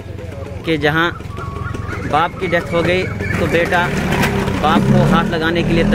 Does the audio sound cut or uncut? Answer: uncut